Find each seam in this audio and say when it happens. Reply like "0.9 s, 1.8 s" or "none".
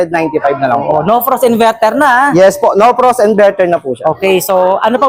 none